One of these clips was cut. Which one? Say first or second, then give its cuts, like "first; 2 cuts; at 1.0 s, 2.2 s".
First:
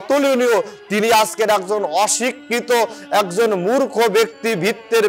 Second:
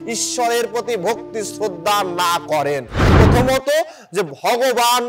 second; 1 cut; at 3.1 s